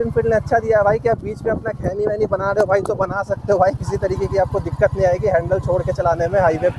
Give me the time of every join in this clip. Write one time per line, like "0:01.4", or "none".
none